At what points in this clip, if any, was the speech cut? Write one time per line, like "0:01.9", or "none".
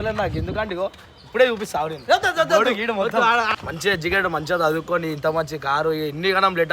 0:03.5